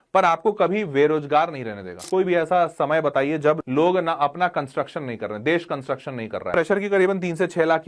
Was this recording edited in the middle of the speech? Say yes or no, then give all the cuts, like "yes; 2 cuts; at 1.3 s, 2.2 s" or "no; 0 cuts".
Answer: yes; 3 cuts; at 2.0 s, 3.6 s, 6.5 s